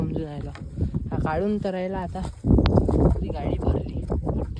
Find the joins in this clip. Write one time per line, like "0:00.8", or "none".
none